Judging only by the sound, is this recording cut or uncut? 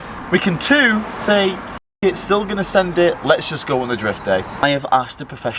cut